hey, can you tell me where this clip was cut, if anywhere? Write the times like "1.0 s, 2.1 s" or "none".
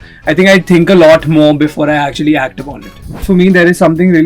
3.2 s